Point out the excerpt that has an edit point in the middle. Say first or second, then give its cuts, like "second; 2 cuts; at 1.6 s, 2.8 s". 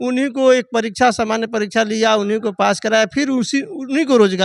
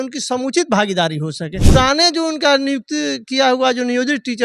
second; 1 cut; at 1.6 s